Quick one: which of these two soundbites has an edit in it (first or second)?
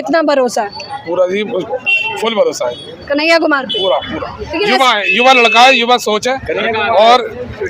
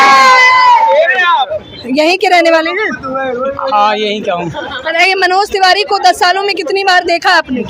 second